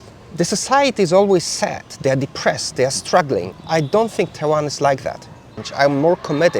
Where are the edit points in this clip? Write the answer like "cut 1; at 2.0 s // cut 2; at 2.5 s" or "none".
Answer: cut 1; at 5.6 s